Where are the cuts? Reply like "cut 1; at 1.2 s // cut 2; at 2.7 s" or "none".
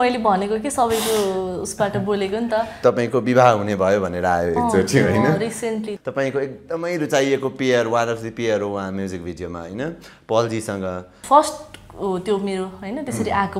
cut 1; at 2.8 s // cut 2; at 5.9 s // cut 3; at 11.2 s